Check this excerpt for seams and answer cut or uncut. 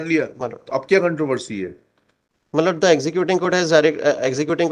uncut